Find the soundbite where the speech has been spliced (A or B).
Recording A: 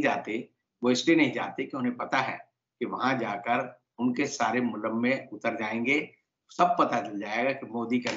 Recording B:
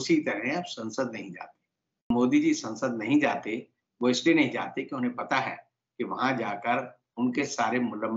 B